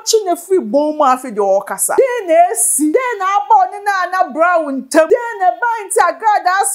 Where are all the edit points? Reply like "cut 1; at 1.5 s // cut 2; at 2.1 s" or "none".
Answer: cut 1; at 1.9 s // cut 2; at 2.9 s // cut 3; at 5.1 s